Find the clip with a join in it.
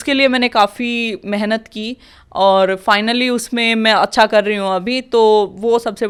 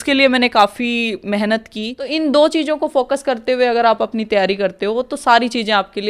second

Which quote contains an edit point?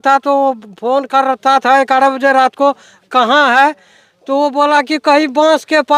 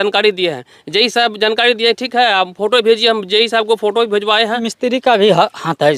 second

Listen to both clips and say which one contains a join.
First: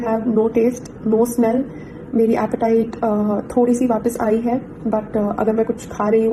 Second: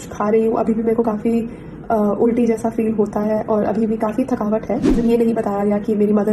second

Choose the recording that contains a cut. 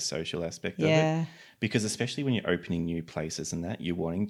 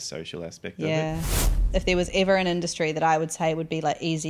second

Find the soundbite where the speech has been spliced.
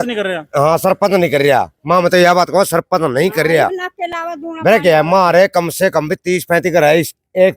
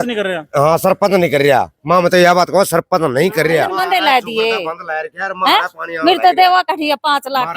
second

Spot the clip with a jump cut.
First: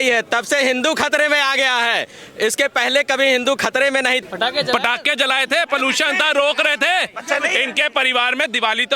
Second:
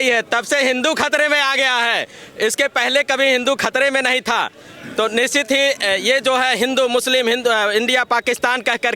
first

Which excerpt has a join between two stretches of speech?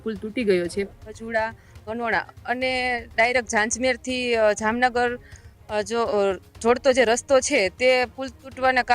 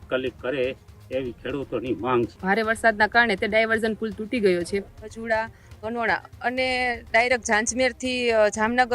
second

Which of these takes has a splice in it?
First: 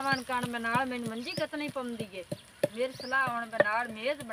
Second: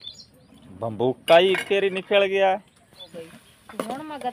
second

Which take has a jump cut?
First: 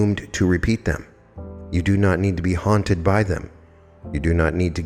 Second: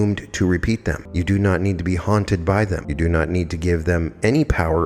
second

